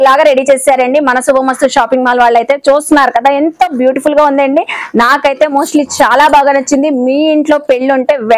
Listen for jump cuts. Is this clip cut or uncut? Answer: uncut